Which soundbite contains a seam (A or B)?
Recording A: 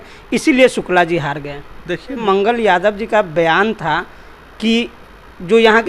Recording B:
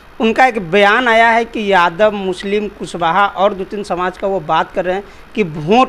A